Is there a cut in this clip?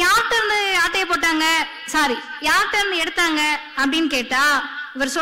no; 0 cuts

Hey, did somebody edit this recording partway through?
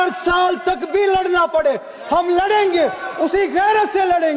no; 0 cuts

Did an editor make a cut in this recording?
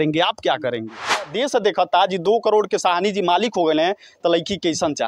yes; 1 cut; at 1.3 s

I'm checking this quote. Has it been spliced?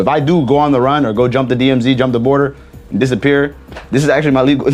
no; 0 cuts

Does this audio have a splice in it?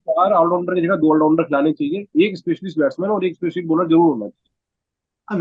no; 0 cuts

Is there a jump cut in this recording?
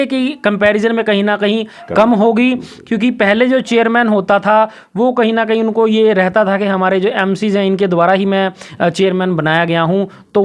no; 0 cuts

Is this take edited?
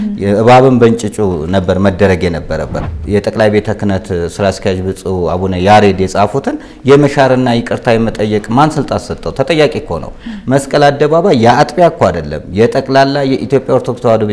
yes; 1 cut; at 2.8 s

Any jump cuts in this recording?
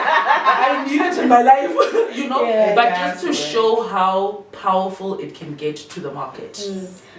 no; 0 cuts

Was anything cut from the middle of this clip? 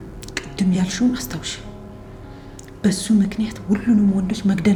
no; 0 cuts

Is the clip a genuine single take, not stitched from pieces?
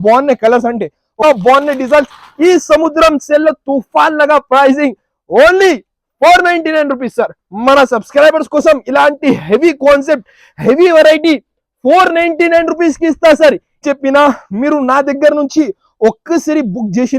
no; 2 cuts; at 1.1 s, 13.8 s

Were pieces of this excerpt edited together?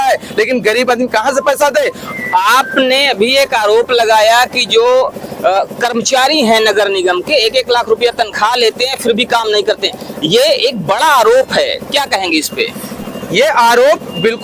no; 0 cuts

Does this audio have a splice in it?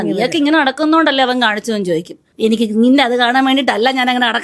no; 0 cuts

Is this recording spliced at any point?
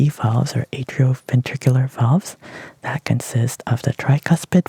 no; 0 cuts

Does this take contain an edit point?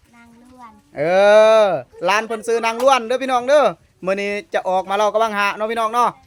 no; 0 cuts

